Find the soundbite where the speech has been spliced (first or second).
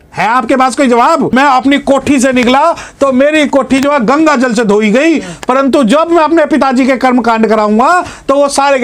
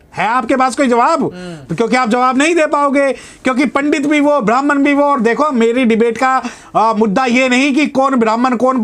first